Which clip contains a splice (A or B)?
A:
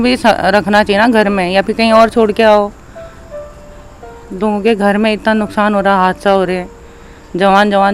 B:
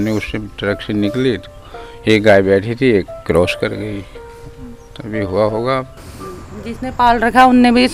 B